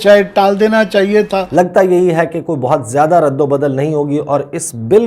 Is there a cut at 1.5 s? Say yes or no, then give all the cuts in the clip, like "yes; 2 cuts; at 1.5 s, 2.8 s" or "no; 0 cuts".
yes; 1 cut; at 1.5 s